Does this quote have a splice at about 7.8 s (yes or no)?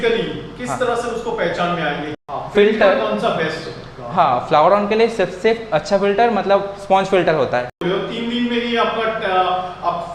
yes